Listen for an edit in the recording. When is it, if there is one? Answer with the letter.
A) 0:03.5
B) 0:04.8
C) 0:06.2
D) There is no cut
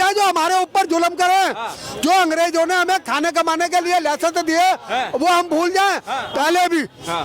C